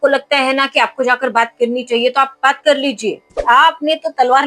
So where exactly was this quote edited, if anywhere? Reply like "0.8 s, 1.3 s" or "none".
3.4 s